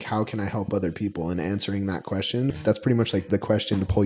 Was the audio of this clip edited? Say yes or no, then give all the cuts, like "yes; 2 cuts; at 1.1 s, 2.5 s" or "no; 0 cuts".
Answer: yes; 1 cut; at 2.5 s